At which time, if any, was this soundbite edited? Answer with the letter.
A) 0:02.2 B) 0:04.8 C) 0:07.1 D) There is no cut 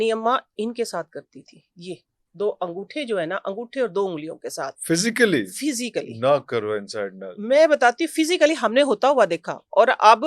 D